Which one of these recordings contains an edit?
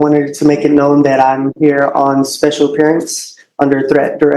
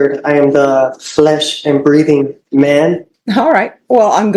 second; 1 cut; at 3.1 s

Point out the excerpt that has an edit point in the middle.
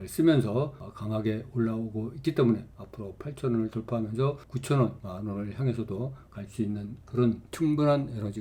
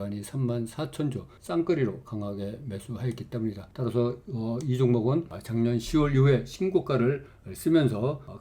second; 1 cut; at 1.3 s

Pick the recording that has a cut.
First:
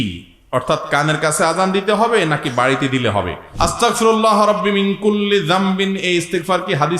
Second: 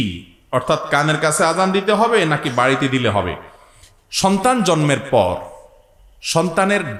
first; 1 cut; at 3.4 s

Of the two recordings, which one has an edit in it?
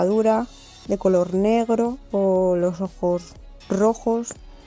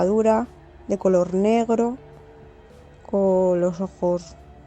first; 1 cut; at 2.0 s

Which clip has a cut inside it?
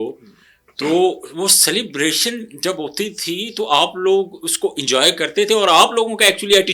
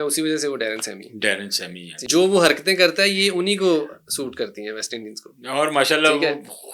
second; 1 cut; at 2.0 s

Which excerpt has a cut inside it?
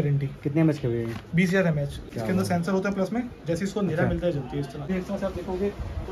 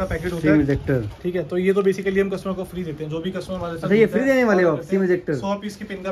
first; 2 cuts; at 2.1 s, 4.9 s

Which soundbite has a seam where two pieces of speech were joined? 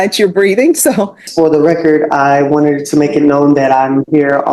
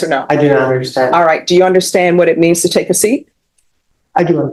first; 1 cut; at 1.2 s

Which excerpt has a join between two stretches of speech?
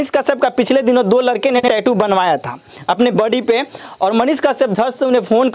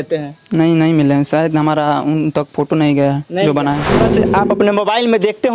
second; 1 cut; at 3.9 s

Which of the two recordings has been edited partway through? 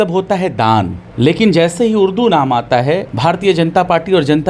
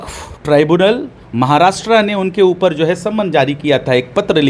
first; 2 cuts; at 1.0 s, 3.1 s

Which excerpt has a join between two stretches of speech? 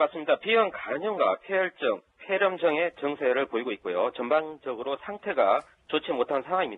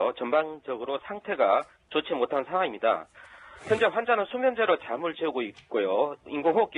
second; 1 cut; at 4.9 s

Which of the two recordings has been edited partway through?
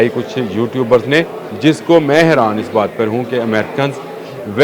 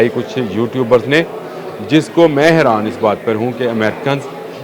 first; 1 cut; at 1.4 s

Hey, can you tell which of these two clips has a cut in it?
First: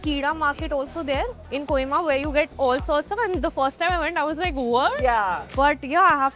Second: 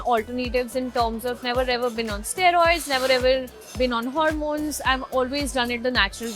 first; 2 cuts; at 1.5 s, 5.4 s

